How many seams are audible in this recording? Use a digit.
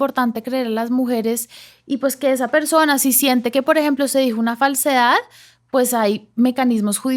0